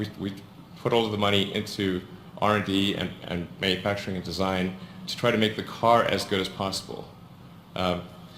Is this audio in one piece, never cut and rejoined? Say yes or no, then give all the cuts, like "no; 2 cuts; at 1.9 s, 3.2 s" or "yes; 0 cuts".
no; 2 cuts; at 4.6 s, 6.5 s